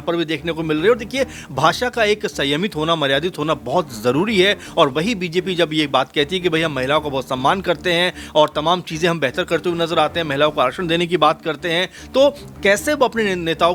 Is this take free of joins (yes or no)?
yes